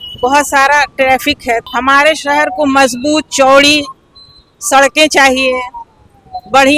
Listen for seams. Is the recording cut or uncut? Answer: cut